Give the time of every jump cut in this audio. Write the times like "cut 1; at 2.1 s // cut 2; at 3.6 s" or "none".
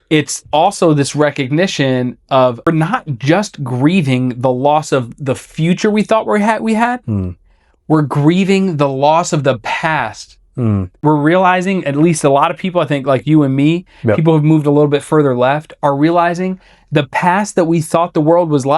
cut 1; at 2.7 s // cut 2; at 11.0 s